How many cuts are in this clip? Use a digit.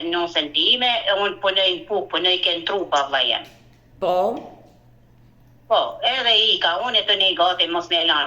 0